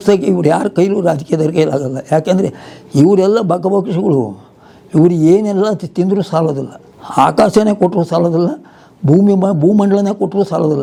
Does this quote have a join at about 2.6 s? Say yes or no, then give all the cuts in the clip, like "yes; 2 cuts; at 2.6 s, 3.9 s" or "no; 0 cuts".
no; 0 cuts